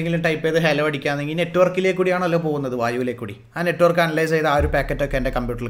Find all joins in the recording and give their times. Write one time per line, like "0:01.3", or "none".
none